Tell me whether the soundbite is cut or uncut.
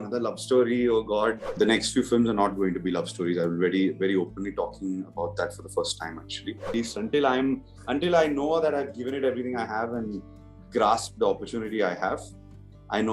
cut